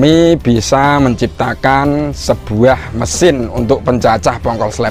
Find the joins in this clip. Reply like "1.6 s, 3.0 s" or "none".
none